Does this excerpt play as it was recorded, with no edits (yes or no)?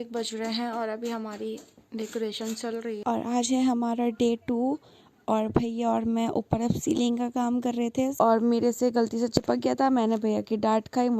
no